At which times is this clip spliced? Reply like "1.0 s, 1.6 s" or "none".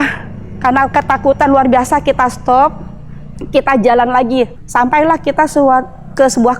4.6 s